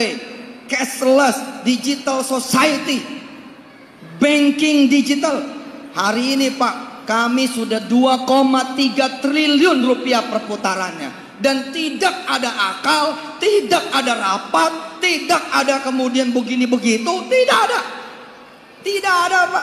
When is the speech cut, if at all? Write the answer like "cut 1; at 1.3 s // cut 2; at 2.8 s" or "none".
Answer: none